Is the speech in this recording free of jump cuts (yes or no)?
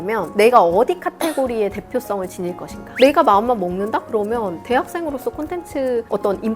no